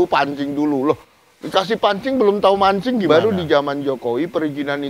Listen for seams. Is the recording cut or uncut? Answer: cut